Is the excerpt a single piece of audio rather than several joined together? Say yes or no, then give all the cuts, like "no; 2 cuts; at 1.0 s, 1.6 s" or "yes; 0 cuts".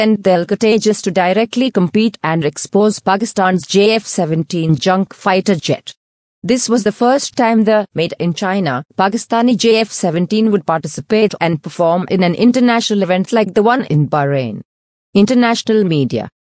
no; 1 cut; at 10.9 s